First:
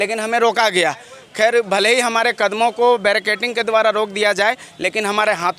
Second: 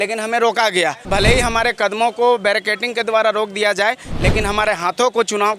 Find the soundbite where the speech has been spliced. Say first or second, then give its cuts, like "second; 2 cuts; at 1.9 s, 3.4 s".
second; 1 cut; at 1.1 s